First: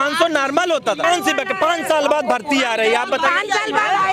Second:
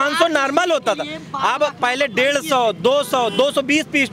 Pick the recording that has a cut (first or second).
first